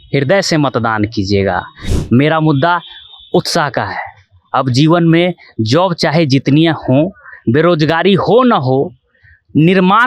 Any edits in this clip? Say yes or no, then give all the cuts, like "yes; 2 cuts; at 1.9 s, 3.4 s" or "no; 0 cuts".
yes; 1 cut; at 1.8 s